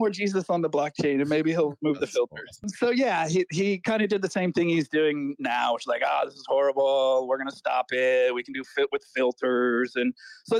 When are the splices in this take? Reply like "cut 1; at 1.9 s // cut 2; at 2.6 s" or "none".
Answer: none